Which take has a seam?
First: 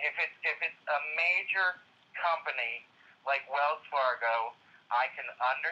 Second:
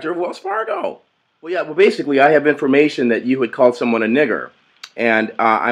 second; 1 cut; at 1.7 s

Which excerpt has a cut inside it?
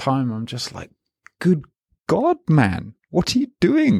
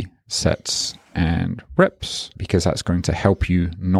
second; 1 cut; at 2.3 s

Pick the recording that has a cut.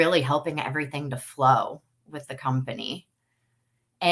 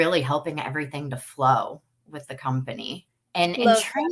second; 1 cut; at 3.1 s

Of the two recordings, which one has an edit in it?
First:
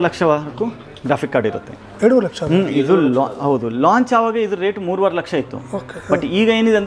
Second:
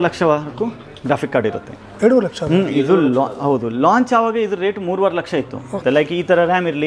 second; 1 cut; at 5.8 s

